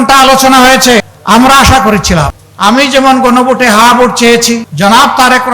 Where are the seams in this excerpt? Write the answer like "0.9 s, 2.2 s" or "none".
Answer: 1.1 s, 2.4 s, 4.7 s